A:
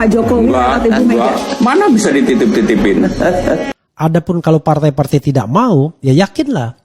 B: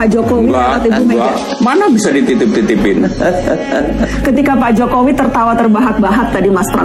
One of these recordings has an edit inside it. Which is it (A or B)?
A